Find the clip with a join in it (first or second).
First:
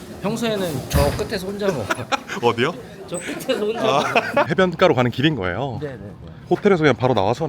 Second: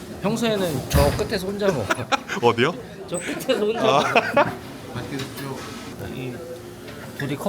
first